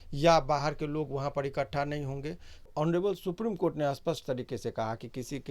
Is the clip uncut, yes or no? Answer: no